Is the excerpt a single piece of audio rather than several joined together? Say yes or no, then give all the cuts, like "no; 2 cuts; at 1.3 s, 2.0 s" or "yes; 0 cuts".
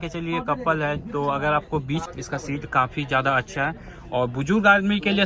no; 1 cut; at 2.1 s